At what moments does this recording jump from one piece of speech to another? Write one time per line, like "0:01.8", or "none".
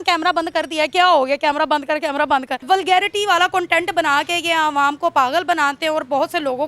0:02.7